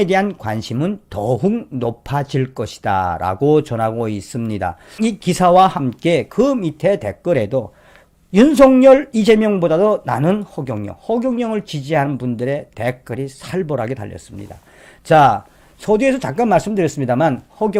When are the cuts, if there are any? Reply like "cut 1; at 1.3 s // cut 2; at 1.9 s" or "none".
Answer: none